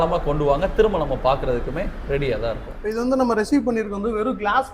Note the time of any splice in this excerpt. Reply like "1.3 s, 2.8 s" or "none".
2.7 s